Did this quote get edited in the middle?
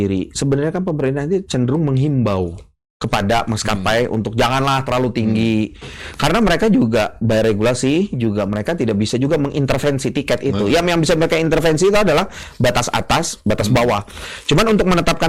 no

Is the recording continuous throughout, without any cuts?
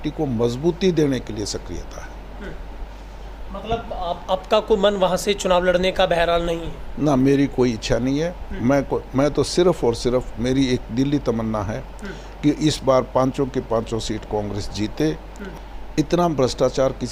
no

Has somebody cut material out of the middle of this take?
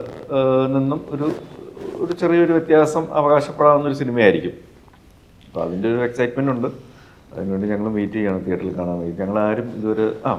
no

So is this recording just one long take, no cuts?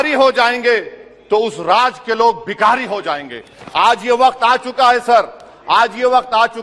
yes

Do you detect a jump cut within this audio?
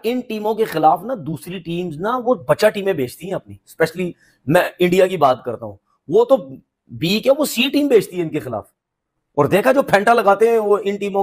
no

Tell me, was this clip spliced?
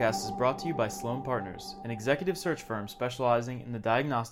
no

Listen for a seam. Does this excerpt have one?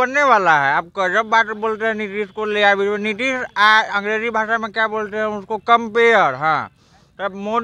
no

